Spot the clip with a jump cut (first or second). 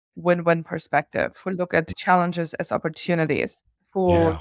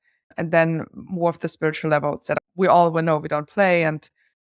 second